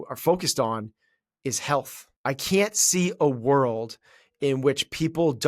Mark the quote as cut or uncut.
cut